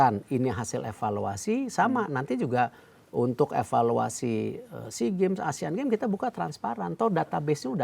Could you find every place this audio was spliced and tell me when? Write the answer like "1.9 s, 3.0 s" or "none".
none